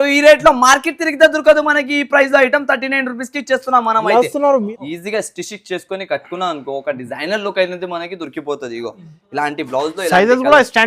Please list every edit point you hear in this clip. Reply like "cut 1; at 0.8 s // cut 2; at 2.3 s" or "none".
cut 1; at 4.7 s